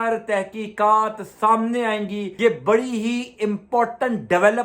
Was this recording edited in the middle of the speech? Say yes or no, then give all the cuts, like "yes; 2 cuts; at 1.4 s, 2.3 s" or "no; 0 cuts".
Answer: yes; 1 cut; at 2.2 s